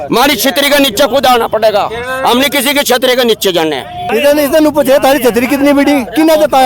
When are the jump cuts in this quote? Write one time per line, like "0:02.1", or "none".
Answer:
0:04.0